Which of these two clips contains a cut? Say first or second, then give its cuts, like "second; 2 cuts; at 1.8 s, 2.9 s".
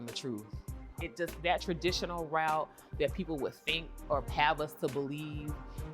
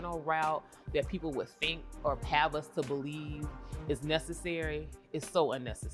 first; 1 cut; at 0.9 s